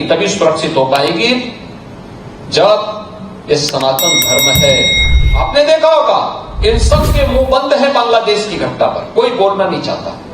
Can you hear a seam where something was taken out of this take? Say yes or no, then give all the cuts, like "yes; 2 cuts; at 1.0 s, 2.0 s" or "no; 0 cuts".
yes; 1 cut; at 5.0 s